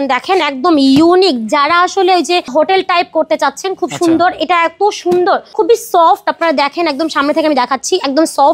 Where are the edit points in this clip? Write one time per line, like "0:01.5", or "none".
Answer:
0:02.5
0:05.5